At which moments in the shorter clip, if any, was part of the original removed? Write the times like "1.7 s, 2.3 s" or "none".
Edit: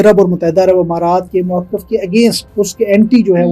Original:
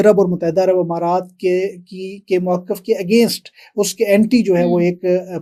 1.3 s, 2.4 s